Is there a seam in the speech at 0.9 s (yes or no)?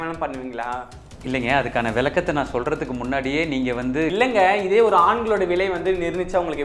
no